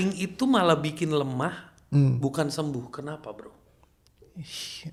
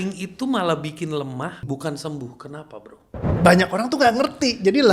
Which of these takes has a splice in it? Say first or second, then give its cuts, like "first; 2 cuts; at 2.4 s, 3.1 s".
second; 2 cuts; at 1.6 s, 3.3 s